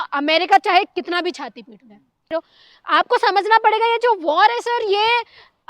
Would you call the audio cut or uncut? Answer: cut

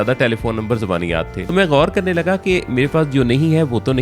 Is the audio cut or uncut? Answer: cut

